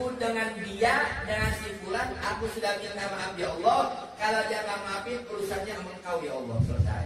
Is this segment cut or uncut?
uncut